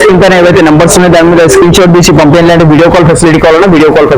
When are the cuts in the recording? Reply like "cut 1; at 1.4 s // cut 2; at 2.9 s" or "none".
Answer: none